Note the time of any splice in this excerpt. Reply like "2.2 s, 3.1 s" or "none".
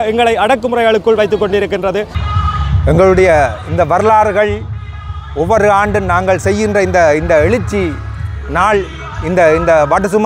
2.2 s